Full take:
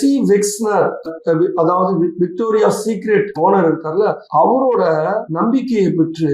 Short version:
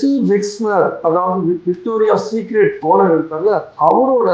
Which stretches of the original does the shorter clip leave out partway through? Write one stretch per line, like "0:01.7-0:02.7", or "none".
0:01.0-0:01.5

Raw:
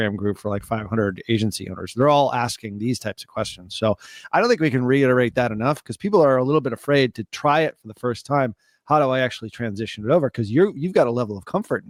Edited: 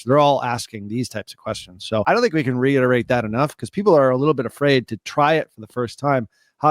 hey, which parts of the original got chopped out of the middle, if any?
0:03.9-0:04.3

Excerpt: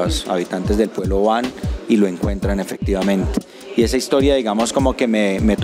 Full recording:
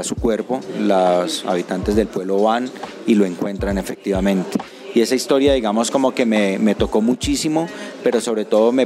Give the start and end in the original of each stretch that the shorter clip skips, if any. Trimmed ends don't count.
none

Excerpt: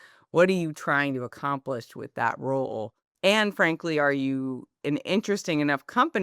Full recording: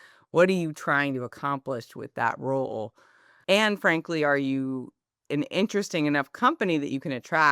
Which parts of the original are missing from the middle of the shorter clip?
0:03.0-0:03.2
0:04.9-0:05.1

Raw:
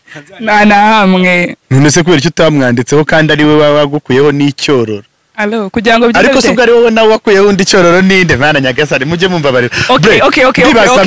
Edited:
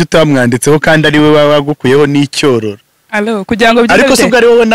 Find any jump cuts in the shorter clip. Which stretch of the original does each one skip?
none

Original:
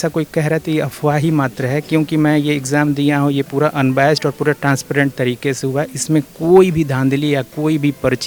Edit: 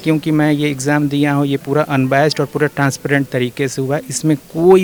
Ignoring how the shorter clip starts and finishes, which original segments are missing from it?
none

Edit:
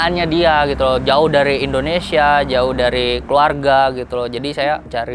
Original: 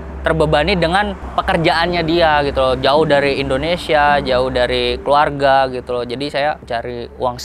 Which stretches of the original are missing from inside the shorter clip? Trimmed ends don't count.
none

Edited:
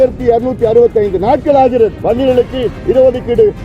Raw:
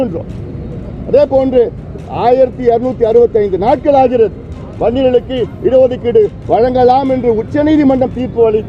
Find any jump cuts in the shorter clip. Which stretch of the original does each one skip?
0:04.4-0:04.7

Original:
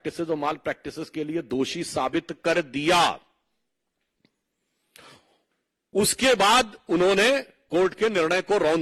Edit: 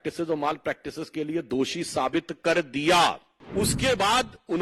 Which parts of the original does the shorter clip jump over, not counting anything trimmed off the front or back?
0:03.3-0:05.7

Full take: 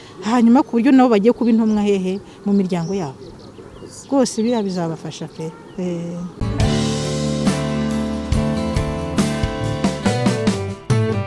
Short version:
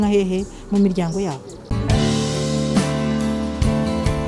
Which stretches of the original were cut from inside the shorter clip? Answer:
0:03.4-0:06.3

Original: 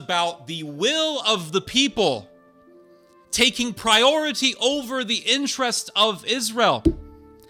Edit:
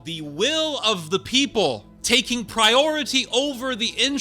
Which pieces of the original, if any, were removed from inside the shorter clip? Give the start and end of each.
0:02.3-0:03.2

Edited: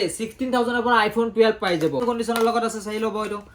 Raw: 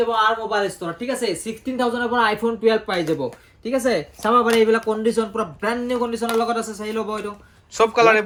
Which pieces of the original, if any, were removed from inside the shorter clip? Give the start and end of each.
0:03.3-0:06.0

